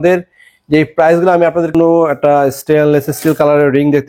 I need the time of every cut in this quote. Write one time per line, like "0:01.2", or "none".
0:01.7